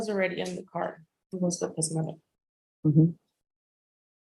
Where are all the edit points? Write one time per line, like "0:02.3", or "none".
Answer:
0:01.6